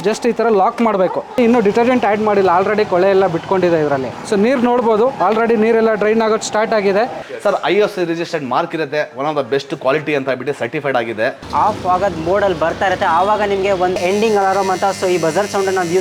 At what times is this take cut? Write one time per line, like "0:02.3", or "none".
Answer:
0:01.3
0:04.1
0:07.2
0:11.5